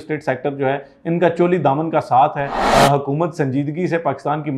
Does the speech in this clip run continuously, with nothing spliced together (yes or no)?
no